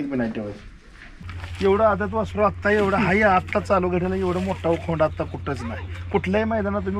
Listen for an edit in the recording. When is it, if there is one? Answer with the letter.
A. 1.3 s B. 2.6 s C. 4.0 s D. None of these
A